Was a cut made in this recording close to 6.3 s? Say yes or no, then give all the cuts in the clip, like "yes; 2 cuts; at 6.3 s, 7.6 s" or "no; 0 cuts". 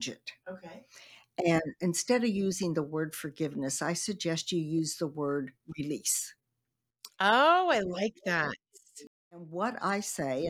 no; 1 cut; at 9.5 s